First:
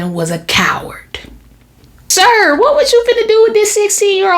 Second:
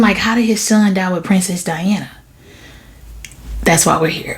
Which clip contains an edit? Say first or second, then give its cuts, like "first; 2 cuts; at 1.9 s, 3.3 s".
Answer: first; 1 cut; at 2.0 s